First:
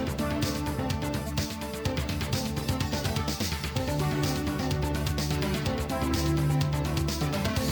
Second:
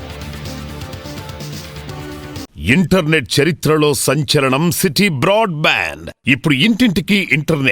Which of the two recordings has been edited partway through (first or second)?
second